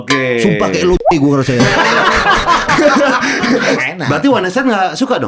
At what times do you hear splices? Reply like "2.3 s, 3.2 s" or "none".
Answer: 3.7 s